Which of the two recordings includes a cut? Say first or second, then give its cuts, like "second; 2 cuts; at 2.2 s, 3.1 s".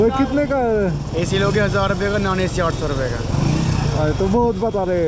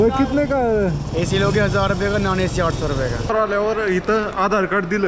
second; 1 cut; at 3.3 s